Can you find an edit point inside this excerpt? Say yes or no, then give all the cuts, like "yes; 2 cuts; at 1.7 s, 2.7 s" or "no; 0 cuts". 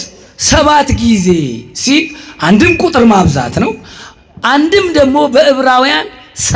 no; 0 cuts